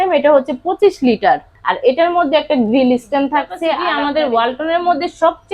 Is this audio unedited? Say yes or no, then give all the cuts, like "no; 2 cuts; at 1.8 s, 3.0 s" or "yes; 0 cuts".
no; 2 cuts; at 1.5 s, 3.8 s